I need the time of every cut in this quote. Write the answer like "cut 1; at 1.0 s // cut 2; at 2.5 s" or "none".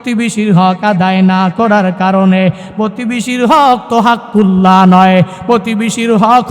none